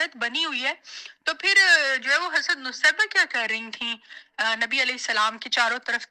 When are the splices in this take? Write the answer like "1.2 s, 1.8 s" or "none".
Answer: none